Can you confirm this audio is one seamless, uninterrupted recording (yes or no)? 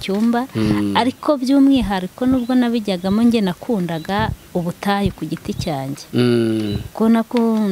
yes